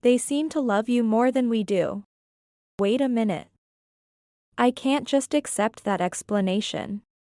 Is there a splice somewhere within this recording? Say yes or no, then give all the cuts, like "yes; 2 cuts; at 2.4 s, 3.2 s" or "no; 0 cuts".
yes; 1 cut; at 2.8 s